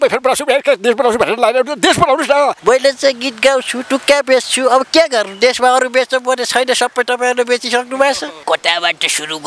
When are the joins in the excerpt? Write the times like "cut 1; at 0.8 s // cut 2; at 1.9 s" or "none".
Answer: cut 1; at 2.6 s // cut 2; at 8.3 s